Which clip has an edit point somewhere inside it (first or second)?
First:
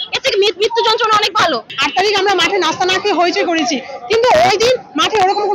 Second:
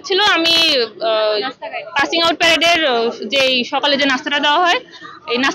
first